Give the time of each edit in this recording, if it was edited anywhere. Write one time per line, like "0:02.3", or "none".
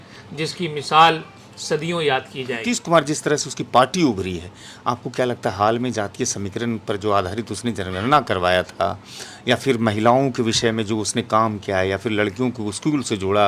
none

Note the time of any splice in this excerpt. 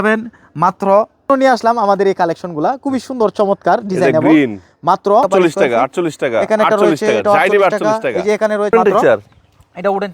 0:01.3
0:05.2
0:08.7

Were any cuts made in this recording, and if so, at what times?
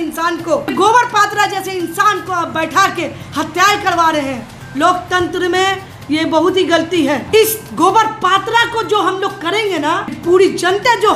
0:00.7
0:07.2
0:10.2

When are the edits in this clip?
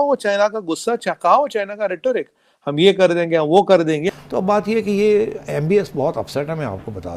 0:04.1

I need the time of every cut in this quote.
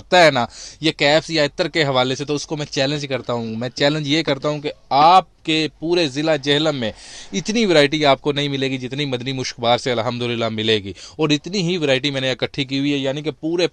none

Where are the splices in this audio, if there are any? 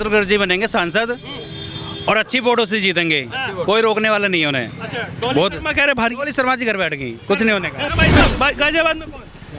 0:07.8

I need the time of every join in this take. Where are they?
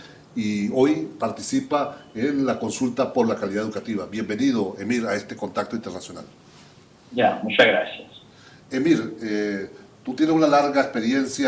0:08.9

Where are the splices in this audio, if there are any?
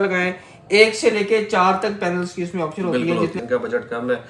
0:03.4

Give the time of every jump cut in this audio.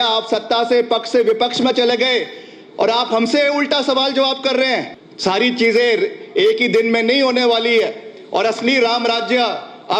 0:05.0

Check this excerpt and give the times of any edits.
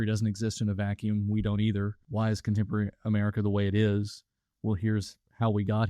0:02.0

